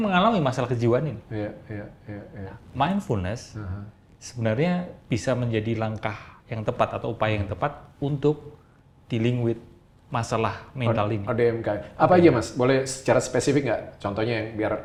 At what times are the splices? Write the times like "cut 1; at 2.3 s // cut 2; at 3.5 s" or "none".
none